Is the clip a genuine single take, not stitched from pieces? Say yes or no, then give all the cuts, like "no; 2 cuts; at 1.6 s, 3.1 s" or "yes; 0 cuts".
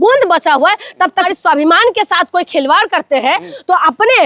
no; 1 cut; at 1.1 s